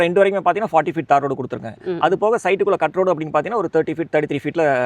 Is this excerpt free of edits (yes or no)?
yes